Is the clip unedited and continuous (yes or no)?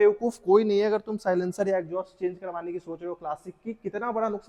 yes